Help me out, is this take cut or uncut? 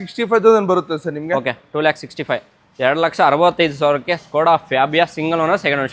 uncut